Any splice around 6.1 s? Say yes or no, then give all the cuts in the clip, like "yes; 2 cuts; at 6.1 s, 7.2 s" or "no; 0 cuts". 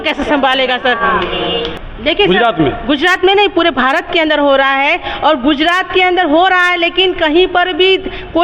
no; 1 cut; at 1.7 s